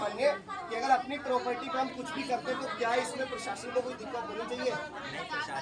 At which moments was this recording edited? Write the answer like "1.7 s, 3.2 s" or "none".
none